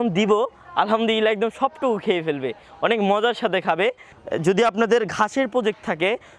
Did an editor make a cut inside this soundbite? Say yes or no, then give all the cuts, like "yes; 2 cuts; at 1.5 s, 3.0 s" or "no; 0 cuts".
no; 0 cuts